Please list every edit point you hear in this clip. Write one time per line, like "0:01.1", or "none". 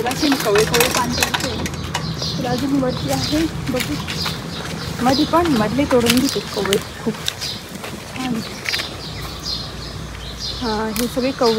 none